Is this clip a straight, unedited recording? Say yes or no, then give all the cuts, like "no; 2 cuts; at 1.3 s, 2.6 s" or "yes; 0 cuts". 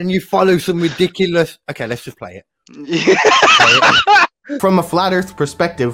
no; 1 cut; at 4.4 s